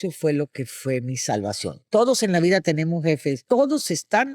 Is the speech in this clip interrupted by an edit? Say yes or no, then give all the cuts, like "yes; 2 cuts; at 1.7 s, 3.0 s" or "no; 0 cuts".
yes; 2 cuts; at 1.7 s, 3.4 s